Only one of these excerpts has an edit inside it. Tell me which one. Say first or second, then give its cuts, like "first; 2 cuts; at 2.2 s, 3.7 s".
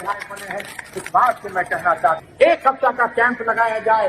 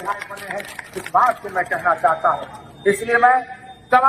first; 1 cut; at 2.2 s